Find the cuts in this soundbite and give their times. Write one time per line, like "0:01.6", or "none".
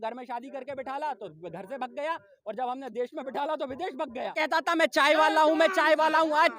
0:04.4